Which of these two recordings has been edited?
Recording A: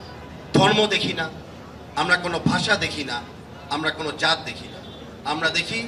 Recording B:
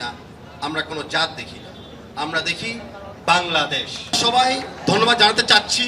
B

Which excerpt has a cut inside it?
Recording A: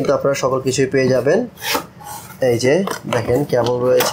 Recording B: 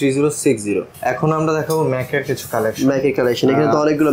B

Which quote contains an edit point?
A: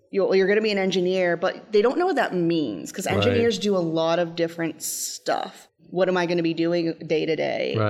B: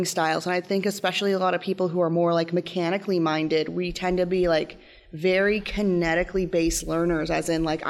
A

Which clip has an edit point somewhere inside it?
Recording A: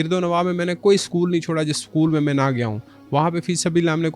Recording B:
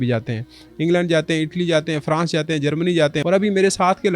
B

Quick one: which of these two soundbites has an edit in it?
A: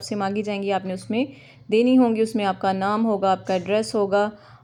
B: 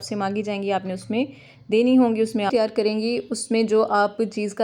B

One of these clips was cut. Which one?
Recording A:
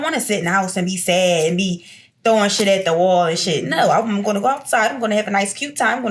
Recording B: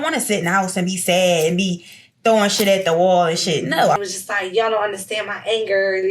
B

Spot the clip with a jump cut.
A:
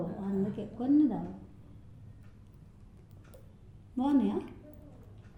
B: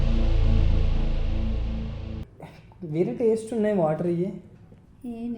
B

